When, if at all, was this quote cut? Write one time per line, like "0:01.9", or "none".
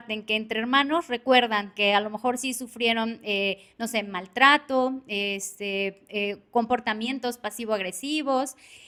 none